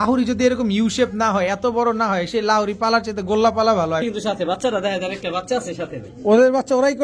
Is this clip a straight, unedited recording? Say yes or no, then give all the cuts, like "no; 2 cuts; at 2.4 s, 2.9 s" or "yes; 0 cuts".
no; 1 cut; at 4.0 s